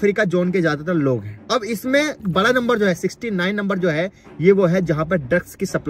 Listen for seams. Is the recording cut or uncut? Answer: cut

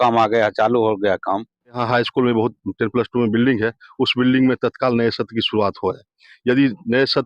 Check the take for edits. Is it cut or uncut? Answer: cut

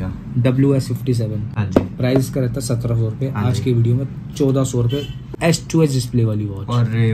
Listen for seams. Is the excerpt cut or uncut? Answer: uncut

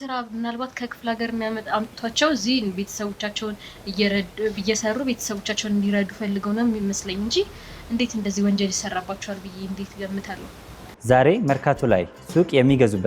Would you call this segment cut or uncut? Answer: cut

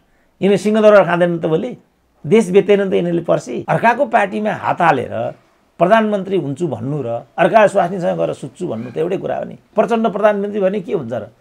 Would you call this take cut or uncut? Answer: cut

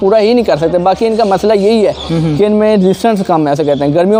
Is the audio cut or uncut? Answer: uncut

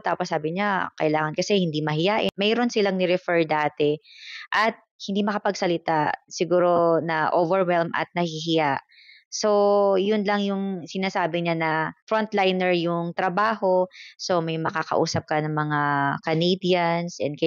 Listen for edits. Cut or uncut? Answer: uncut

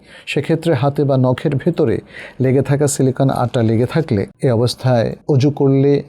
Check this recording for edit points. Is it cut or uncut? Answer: cut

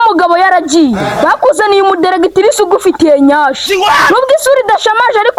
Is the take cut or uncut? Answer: uncut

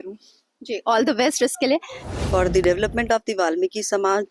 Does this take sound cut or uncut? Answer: cut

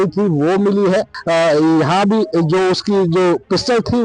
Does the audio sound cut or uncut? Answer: cut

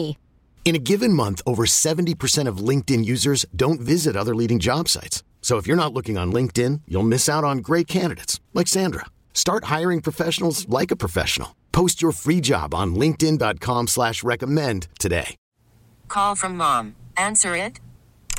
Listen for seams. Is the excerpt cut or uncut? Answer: cut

